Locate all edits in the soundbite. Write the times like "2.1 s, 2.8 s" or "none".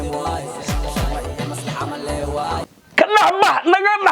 2.6 s